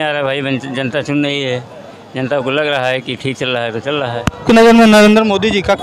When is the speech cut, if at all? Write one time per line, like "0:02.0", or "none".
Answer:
0:04.4